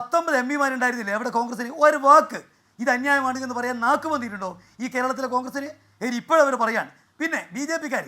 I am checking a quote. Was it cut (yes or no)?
no